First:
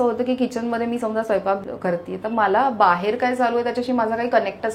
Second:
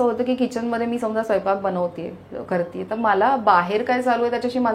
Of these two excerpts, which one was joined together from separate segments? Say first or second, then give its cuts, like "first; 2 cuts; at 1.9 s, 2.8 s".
first; 1 cut; at 1.6 s